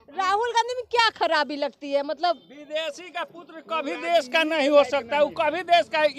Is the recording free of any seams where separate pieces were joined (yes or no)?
yes